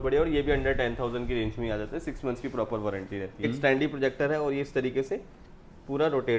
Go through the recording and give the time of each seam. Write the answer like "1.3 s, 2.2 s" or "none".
3.4 s